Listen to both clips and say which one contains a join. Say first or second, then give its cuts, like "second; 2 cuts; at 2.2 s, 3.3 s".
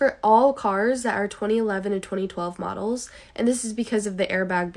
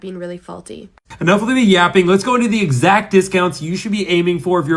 second; 1 cut; at 1.0 s